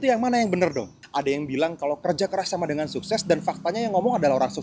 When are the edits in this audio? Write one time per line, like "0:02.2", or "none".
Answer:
0:01.0